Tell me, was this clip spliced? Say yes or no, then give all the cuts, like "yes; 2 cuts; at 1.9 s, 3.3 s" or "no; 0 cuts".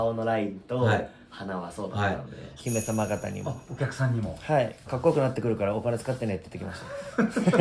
yes; 2 cuts; at 2.6 s, 5.0 s